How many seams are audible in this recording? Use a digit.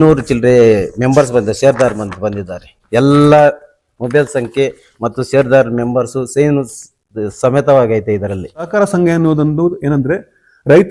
1